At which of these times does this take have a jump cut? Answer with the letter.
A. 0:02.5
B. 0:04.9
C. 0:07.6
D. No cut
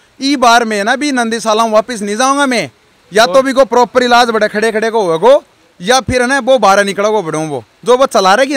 D